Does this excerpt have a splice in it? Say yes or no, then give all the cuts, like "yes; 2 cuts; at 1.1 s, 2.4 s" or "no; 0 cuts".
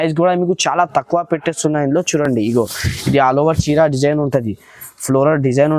no; 0 cuts